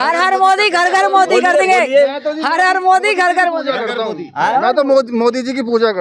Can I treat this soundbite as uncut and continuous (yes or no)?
yes